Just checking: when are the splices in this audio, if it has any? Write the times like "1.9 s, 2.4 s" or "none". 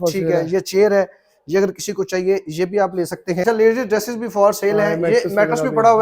3.4 s